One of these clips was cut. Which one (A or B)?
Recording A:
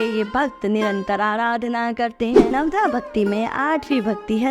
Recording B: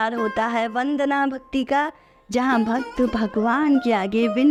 A